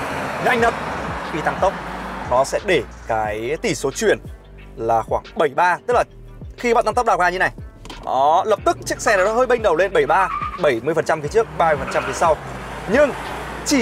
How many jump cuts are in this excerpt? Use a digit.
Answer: 1